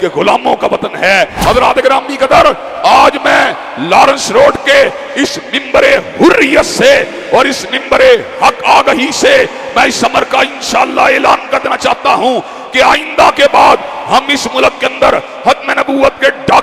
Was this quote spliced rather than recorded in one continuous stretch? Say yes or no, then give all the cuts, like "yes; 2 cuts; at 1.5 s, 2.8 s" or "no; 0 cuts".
yes; 1 cut; at 1.3 s